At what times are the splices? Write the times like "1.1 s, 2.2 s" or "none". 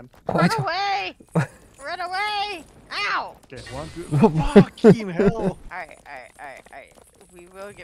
3.4 s, 5.6 s